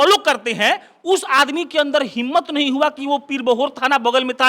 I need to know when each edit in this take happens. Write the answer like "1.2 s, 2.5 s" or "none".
none